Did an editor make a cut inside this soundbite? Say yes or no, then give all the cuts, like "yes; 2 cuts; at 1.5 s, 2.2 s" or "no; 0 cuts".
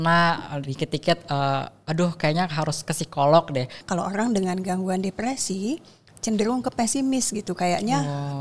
yes; 1 cut; at 3.8 s